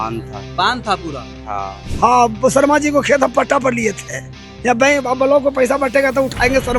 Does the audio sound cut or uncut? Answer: cut